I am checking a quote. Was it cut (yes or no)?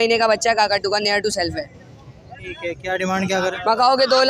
no